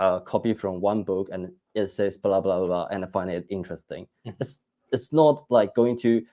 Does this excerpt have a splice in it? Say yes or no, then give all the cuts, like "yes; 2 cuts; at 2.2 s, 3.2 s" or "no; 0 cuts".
no; 0 cuts